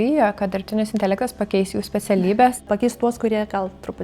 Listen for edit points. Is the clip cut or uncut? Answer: cut